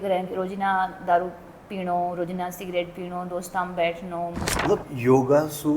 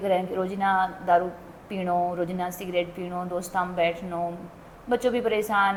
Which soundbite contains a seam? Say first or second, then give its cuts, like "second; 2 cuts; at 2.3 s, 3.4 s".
first; 1 cut; at 4.5 s